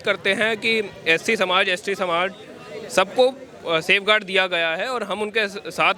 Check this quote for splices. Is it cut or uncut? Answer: uncut